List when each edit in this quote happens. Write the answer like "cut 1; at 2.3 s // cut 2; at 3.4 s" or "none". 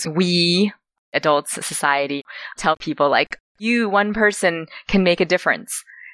cut 1; at 1.2 s // cut 2; at 2.3 s